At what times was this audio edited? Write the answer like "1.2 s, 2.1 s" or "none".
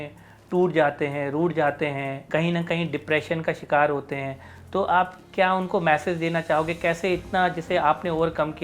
2.2 s